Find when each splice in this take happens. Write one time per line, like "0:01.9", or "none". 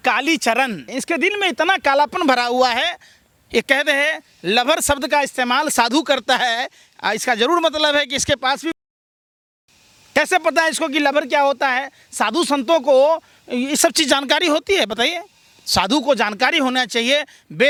none